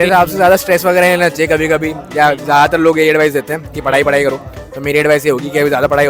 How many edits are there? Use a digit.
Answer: 0